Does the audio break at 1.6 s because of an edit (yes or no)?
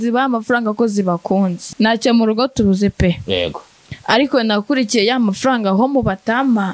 yes